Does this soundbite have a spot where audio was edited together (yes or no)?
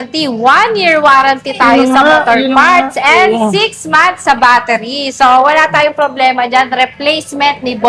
no